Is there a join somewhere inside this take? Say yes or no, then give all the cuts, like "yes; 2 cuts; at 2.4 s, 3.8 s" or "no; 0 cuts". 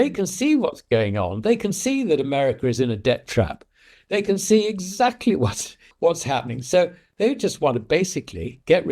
yes; 1 cut; at 5.8 s